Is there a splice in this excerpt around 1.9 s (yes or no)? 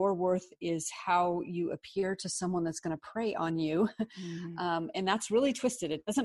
no